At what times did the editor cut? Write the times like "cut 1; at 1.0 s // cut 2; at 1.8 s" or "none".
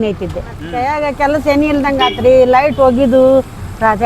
cut 1; at 1.0 s